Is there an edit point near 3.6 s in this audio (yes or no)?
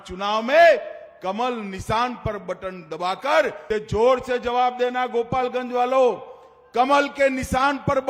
yes